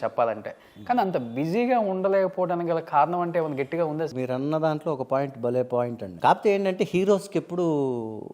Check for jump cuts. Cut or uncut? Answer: cut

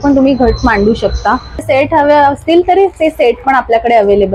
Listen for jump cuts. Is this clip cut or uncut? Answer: cut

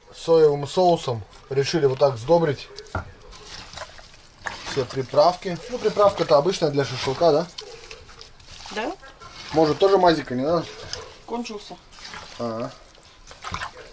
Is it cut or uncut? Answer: uncut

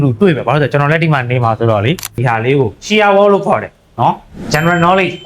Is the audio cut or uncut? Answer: cut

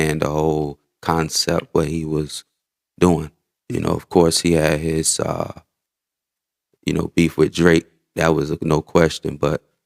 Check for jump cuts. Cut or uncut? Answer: uncut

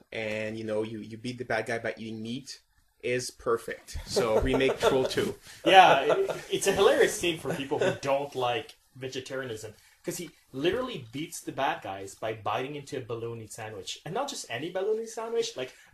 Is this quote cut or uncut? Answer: uncut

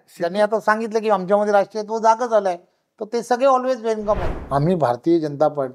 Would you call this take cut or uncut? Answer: cut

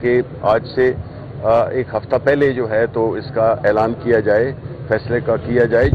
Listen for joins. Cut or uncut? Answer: uncut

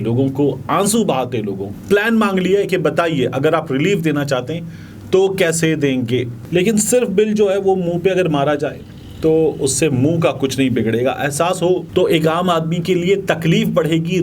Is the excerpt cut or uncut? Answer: cut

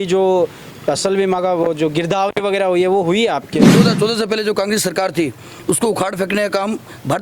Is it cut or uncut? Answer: cut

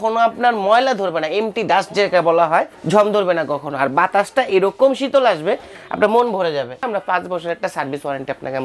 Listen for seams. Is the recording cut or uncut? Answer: cut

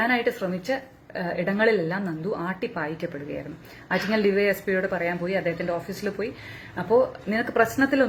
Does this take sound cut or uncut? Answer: uncut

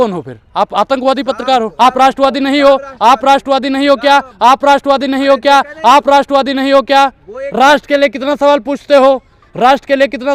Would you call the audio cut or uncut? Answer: uncut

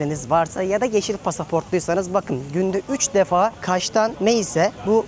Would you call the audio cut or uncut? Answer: uncut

